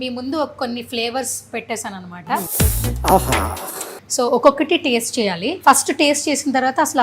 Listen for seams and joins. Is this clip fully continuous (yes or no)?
no